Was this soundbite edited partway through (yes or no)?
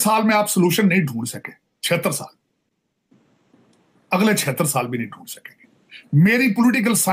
no